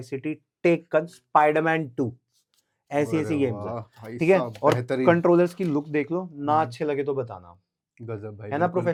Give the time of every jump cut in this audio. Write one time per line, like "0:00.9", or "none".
none